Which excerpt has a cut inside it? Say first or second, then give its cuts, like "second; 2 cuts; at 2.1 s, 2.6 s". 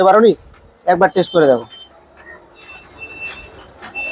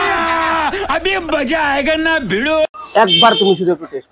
second; 1 cut; at 2.8 s